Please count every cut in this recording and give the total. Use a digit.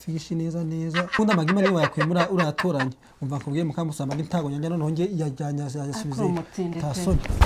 1